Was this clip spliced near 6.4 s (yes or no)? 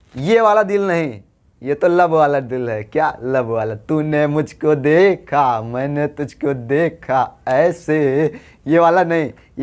no